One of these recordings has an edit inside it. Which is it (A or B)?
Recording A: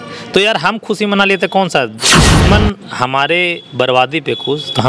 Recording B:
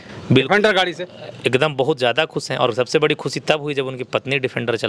A